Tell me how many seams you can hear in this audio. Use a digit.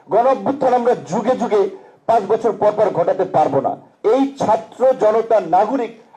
1